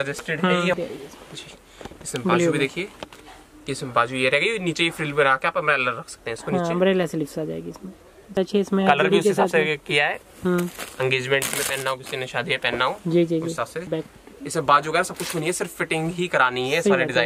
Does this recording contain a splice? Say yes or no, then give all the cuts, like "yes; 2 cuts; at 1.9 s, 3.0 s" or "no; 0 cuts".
yes; 3 cuts; at 0.8 s, 8.3 s, 13.9 s